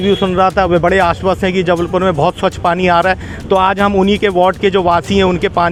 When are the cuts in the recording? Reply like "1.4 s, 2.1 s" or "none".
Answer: none